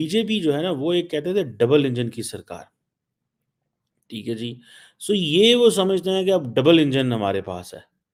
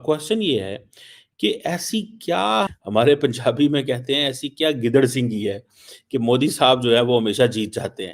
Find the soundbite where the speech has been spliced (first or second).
second